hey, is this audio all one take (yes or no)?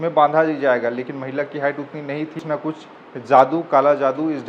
no